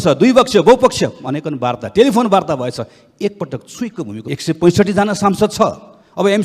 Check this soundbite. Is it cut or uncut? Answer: cut